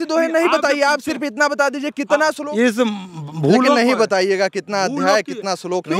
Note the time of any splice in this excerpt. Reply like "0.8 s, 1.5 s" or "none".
2.4 s